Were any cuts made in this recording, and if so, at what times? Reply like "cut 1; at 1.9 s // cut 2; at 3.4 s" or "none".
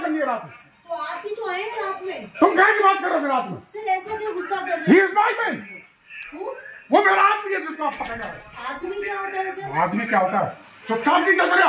none